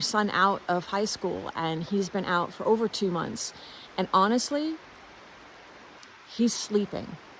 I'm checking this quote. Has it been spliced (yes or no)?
yes